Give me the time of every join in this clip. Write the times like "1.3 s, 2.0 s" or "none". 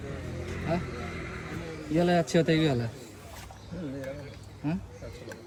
none